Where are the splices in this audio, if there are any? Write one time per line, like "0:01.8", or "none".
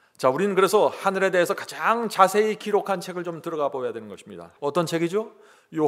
0:04.5